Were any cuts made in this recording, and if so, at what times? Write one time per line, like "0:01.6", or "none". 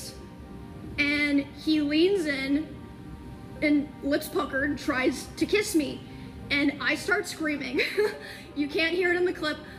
none